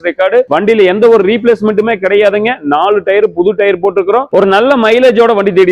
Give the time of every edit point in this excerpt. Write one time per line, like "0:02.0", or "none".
0:04.3